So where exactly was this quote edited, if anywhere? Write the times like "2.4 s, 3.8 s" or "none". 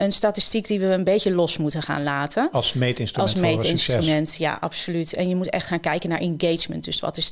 none